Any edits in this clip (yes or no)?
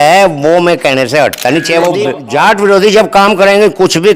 yes